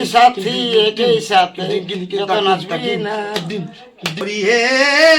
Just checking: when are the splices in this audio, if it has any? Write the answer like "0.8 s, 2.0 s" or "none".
4.2 s